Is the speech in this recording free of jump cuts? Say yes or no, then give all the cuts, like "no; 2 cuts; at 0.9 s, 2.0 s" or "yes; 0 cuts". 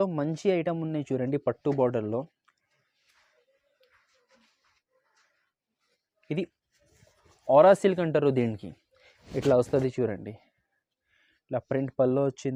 yes; 0 cuts